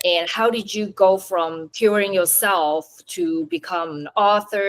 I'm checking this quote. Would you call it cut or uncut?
cut